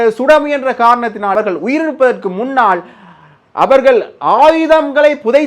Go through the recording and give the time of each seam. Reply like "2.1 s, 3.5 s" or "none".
1.3 s